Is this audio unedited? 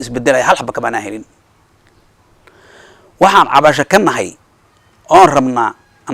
yes; 0 cuts

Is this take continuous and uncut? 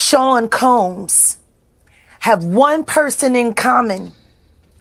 yes; 0 cuts

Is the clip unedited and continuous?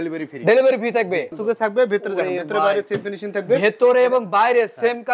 no; 1 cut; at 1.4 s

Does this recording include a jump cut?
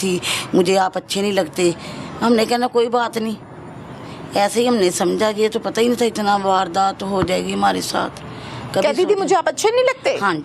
no; 0 cuts

